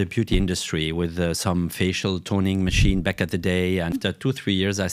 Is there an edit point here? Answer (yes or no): yes